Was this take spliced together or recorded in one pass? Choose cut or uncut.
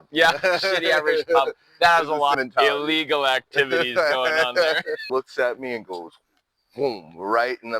cut